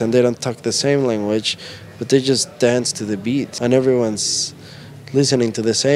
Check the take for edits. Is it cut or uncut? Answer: cut